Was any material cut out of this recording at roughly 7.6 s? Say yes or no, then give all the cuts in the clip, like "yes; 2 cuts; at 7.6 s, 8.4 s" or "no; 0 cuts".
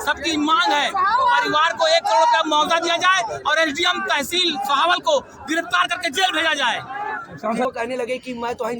yes; 1 cut; at 7.6 s